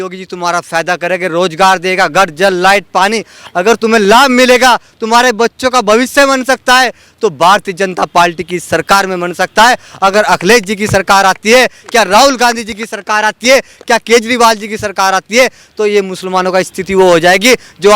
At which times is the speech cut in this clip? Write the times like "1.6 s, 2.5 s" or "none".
none